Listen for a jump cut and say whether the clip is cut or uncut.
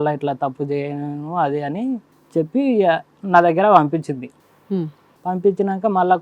cut